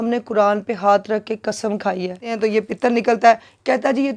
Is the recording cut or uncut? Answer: cut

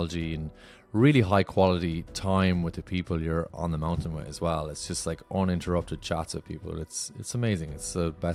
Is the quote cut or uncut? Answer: uncut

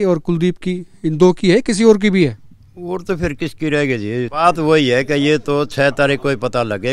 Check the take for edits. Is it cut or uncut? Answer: cut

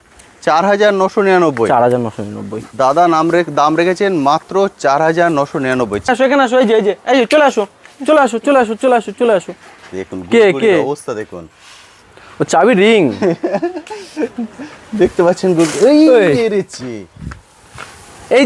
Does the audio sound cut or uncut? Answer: cut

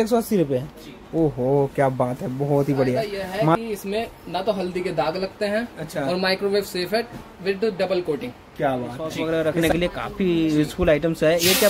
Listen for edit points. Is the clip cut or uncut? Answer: cut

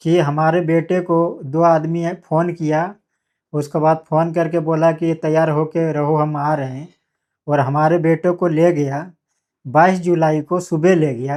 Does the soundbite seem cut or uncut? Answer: uncut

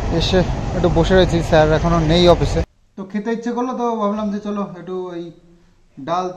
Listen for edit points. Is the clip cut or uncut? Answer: cut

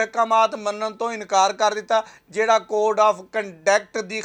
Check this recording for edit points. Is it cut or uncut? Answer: uncut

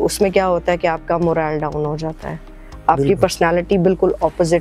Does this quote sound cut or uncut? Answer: uncut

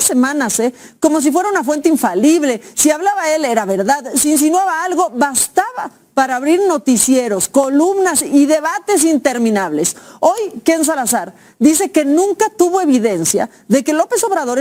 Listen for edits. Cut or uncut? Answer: uncut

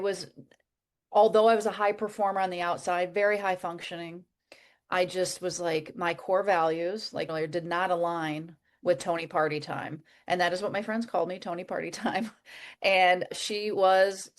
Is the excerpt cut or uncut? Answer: cut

